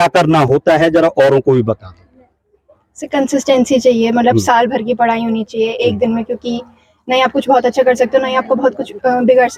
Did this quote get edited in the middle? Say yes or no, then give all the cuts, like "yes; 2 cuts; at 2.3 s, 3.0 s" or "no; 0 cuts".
no; 0 cuts